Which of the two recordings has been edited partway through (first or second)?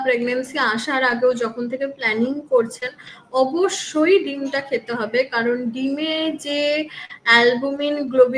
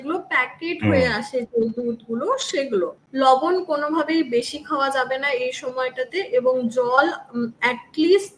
second